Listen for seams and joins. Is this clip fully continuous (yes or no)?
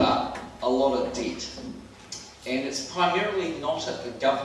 no